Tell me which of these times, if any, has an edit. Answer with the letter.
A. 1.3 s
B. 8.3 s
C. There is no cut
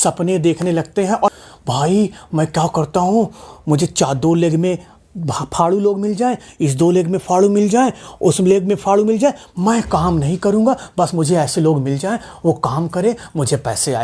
A